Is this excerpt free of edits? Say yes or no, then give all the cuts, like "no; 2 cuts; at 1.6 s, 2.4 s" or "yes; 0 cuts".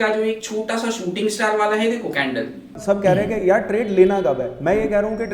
no; 1 cut; at 2.7 s